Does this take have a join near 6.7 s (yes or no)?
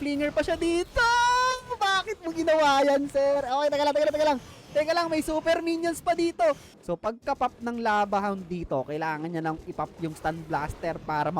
yes